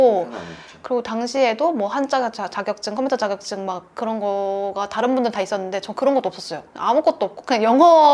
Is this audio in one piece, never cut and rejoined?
yes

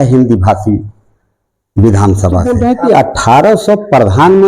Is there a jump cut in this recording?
yes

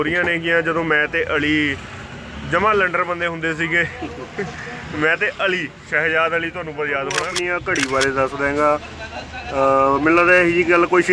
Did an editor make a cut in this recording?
yes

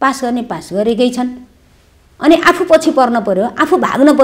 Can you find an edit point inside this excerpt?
no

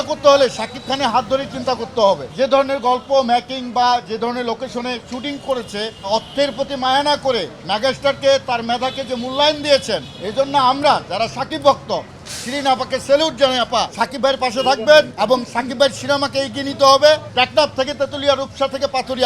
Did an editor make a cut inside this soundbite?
yes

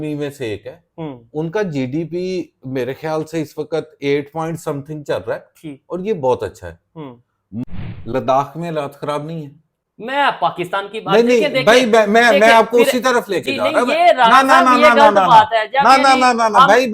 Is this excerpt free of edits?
no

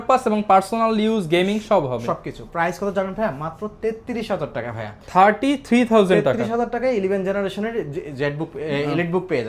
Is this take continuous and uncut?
yes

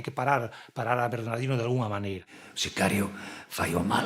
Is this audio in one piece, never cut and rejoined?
no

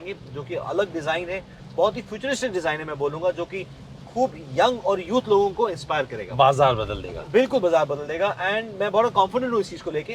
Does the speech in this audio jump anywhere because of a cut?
no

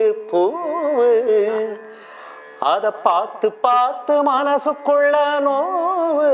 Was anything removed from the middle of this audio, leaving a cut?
no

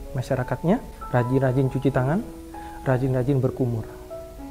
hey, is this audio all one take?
no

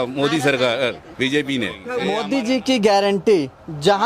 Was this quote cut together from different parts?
yes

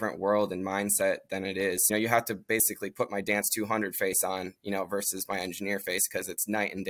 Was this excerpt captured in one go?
no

